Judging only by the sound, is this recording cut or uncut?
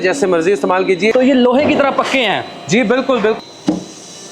cut